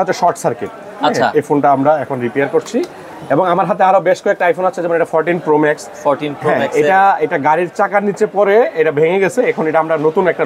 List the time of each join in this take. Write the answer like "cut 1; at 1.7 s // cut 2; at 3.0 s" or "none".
none